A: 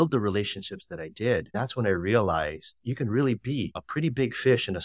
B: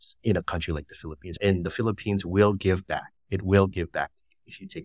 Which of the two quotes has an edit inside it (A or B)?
A